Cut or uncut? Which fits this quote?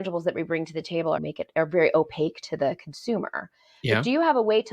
cut